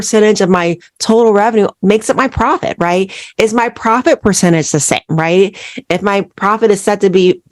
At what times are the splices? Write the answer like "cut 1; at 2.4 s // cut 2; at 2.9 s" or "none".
cut 1; at 1.7 s